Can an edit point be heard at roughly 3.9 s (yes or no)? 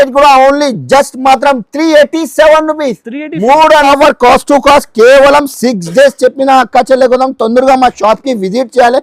yes